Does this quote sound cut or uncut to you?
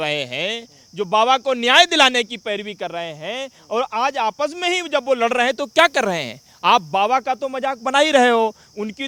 uncut